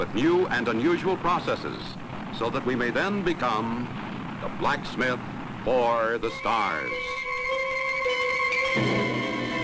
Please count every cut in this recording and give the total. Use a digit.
1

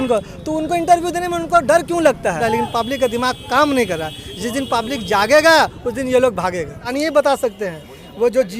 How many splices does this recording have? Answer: 2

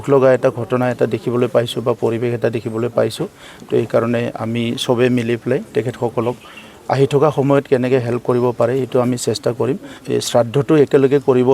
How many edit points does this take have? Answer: 1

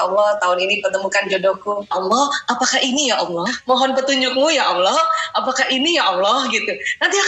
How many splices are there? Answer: 2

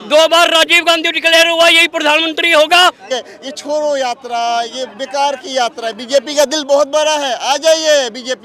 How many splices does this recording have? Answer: 1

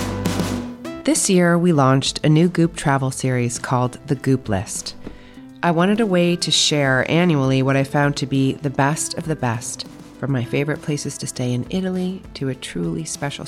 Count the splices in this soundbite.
1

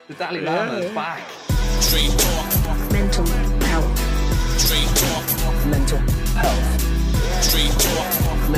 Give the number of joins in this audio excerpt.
1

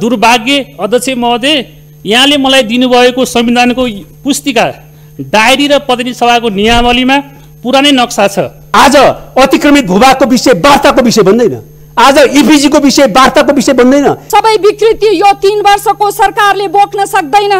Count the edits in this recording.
2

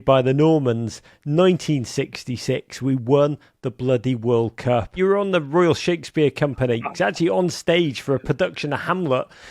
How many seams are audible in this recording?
2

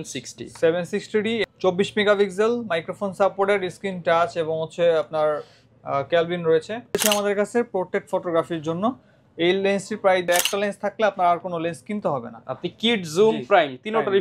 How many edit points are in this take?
3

